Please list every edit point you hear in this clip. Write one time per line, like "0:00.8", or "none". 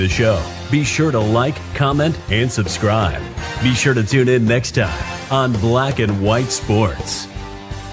none

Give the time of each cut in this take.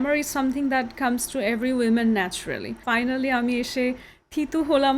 0:02.8

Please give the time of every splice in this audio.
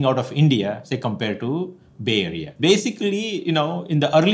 0:02.6

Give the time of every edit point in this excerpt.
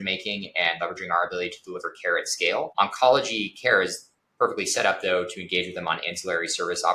none

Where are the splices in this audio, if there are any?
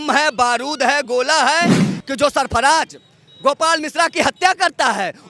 0:01.9

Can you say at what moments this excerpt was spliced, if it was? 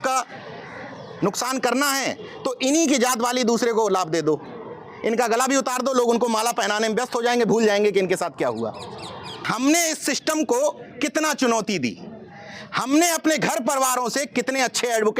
0:09.4

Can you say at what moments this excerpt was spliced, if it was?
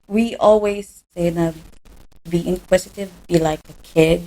0:01.1

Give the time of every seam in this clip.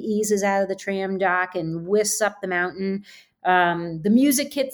none

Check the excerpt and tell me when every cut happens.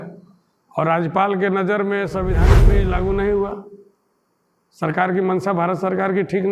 0:02.6

